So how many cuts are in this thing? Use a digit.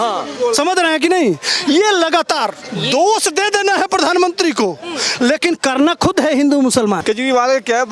1